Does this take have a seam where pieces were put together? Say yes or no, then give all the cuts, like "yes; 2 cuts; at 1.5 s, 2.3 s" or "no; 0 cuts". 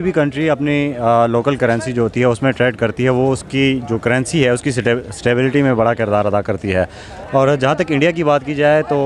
no; 0 cuts